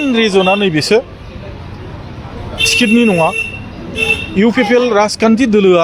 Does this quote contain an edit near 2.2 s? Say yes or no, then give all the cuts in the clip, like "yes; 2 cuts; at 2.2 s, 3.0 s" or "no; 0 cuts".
no; 0 cuts